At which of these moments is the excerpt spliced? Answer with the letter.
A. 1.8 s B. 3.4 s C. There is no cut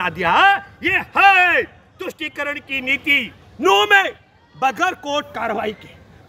B